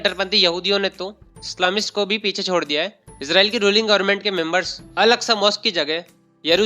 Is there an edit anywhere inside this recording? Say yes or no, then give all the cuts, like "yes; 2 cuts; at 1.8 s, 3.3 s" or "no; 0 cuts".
yes; 2 cuts; at 3.1 s, 4.8 s